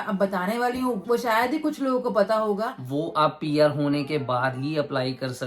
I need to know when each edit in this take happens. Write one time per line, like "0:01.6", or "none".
0:02.8